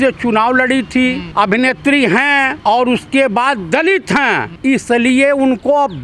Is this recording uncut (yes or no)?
no